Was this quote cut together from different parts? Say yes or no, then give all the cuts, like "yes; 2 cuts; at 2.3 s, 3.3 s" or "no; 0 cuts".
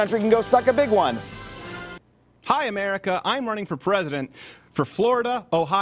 yes; 1 cut; at 1.9 s